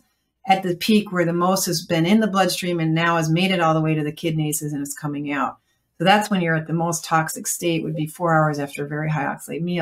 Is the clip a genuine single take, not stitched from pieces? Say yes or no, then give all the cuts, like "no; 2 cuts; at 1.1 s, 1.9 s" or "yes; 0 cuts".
yes; 0 cuts